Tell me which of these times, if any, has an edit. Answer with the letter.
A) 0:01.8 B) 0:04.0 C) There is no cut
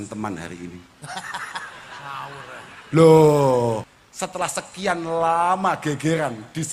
B